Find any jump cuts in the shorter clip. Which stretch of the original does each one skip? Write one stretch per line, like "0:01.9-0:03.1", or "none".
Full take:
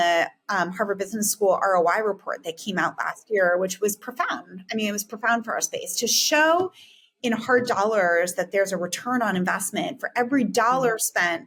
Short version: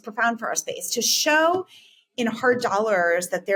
none